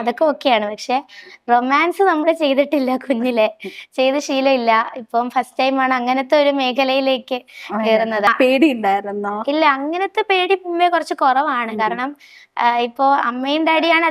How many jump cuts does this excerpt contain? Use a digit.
1